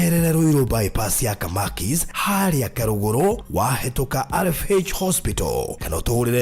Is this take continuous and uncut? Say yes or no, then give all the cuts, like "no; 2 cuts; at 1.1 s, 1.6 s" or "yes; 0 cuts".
no; 1 cut; at 4.4 s